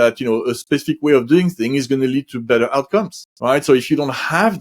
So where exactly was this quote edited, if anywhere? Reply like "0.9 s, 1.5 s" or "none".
3.2 s